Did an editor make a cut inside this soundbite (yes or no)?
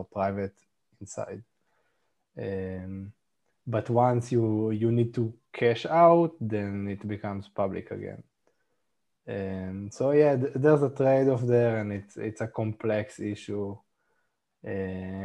no